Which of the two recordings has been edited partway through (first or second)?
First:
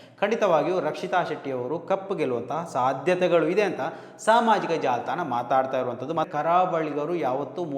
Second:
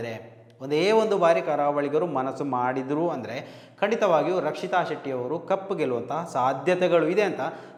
first